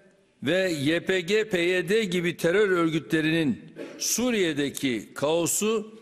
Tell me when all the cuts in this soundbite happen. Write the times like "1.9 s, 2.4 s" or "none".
1.5 s